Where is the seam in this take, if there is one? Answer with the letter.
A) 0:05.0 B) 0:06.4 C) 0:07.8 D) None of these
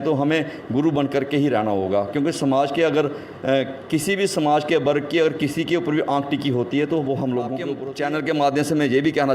C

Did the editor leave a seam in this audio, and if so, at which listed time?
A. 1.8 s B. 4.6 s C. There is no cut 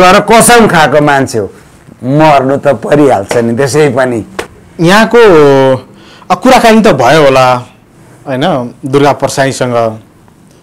B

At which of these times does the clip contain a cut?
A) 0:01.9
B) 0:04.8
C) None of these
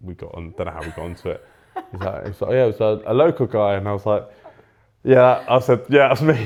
C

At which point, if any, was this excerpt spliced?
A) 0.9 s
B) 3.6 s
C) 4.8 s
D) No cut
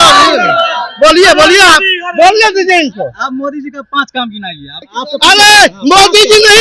C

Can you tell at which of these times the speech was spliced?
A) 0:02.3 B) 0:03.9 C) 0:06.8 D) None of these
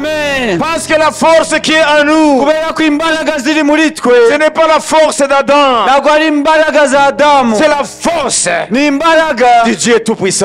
D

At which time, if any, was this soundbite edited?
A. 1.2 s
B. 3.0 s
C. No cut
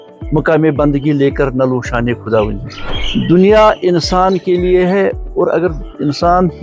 B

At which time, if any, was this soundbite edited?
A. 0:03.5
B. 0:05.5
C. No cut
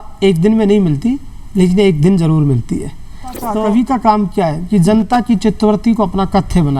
A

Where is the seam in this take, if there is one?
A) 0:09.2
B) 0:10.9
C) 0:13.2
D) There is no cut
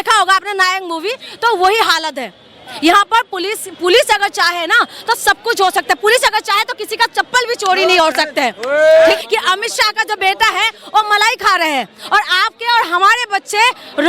A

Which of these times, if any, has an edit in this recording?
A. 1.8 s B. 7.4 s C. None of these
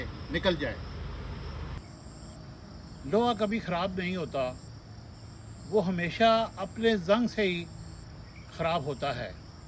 A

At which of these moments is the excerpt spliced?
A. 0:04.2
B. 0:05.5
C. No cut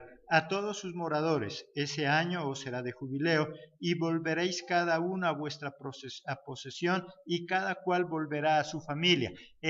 A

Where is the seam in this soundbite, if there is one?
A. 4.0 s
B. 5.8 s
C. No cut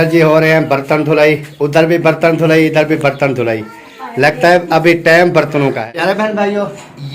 B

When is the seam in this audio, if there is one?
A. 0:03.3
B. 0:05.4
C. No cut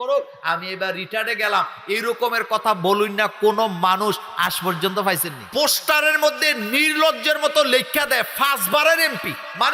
B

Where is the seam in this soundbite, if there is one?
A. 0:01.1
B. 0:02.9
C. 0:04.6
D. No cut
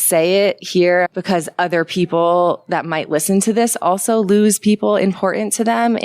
A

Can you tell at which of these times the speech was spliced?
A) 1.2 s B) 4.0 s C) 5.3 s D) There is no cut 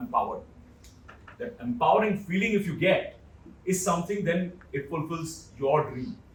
D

